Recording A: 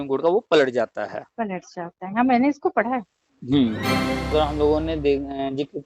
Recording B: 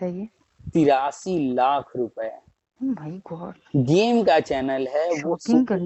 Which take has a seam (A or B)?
A